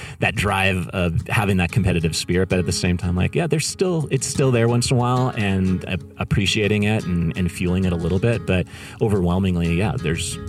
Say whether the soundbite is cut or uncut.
uncut